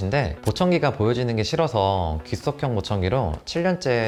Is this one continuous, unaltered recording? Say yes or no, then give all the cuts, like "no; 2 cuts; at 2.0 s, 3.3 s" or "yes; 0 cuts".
yes; 0 cuts